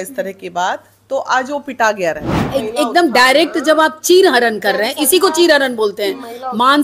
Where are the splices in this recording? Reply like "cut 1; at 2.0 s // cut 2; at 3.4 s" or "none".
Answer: cut 1; at 2.3 s